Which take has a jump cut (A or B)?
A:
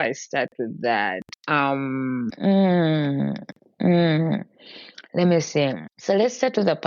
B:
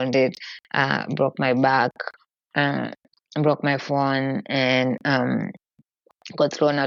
A